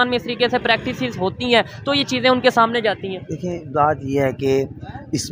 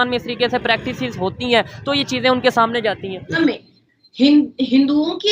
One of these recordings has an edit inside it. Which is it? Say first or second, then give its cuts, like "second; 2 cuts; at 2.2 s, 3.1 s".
second; 1 cut; at 3.4 s